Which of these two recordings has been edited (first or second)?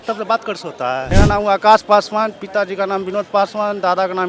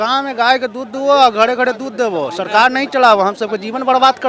first